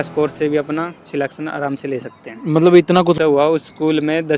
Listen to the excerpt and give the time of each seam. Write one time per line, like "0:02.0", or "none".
0:03.2